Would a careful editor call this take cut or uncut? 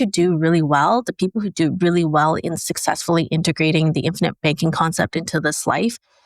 uncut